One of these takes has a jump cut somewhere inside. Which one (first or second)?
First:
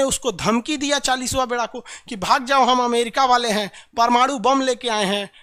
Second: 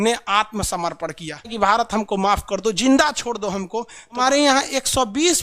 second